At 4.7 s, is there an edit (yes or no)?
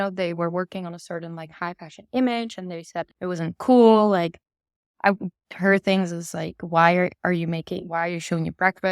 no